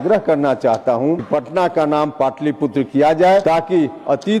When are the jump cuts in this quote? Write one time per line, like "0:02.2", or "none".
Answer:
0:01.2
0:03.4